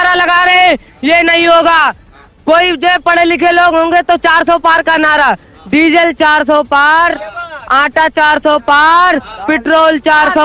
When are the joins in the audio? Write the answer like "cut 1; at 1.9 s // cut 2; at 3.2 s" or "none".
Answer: none